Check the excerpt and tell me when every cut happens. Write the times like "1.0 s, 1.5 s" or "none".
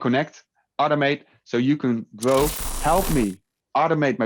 2.7 s